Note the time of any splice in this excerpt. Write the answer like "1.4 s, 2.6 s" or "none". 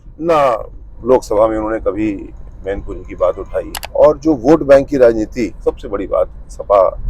3.8 s